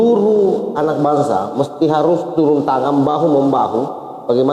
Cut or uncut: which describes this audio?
uncut